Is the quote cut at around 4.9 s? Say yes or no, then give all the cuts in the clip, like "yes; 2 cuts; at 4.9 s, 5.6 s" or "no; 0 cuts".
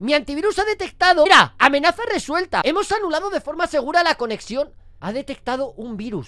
yes; 1 cut; at 4.9 s